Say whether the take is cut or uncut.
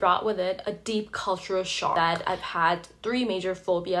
cut